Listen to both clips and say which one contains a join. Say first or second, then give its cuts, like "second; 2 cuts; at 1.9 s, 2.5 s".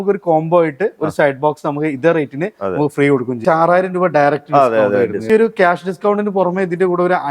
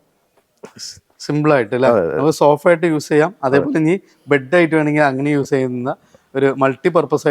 first; 2 cuts; at 3.4 s, 5.3 s